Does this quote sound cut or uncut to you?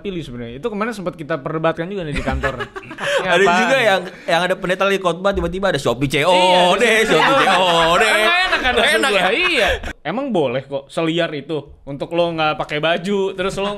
cut